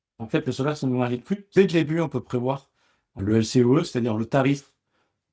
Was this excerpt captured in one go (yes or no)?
no